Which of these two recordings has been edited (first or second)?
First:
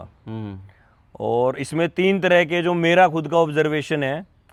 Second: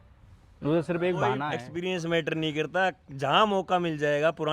second